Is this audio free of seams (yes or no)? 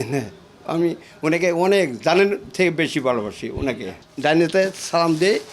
no